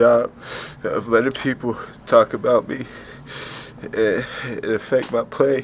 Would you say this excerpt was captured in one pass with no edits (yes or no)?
yes